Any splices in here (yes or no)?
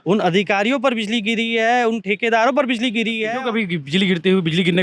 yes